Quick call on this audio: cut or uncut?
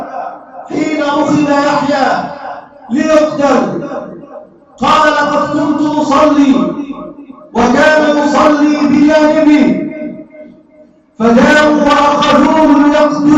uncut